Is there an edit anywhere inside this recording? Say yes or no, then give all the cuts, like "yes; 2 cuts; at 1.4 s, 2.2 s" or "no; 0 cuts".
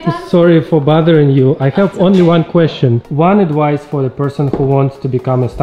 yes; 1 cut; at 3.1 s